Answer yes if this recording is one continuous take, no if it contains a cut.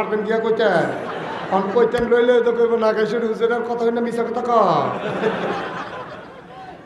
yes